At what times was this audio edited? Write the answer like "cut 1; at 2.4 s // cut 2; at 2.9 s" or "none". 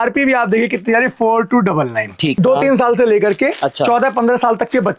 cut 1; at 2.4 s